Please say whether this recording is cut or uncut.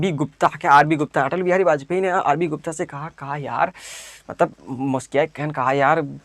uncut